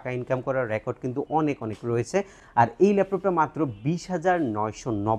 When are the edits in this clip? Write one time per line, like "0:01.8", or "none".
none